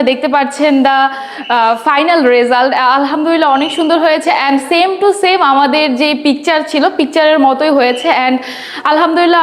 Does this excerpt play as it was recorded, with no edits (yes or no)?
yes